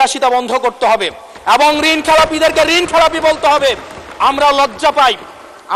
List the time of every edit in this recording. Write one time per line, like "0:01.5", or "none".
none